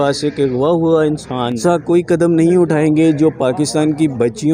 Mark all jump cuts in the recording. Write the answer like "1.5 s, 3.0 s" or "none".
1.6 s